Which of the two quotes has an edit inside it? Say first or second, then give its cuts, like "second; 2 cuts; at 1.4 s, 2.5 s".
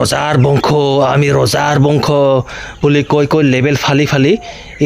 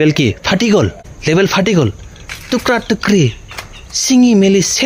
second; 1 cut; at 1.1 s